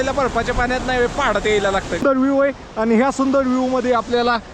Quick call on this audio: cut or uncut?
cut